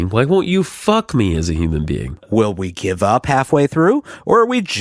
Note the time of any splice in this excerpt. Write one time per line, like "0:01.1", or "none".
0:02.1